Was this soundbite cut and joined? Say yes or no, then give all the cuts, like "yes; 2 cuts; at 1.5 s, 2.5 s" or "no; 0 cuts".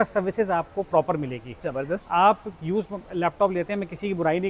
no; 0 cuts